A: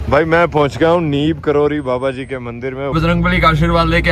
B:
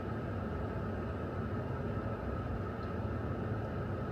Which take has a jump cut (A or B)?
A